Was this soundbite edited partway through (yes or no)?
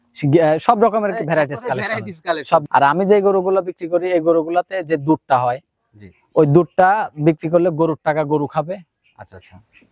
yes